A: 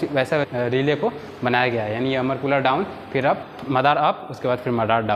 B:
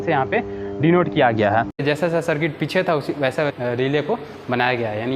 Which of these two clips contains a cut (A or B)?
B